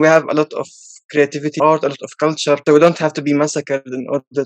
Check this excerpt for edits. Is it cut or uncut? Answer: cut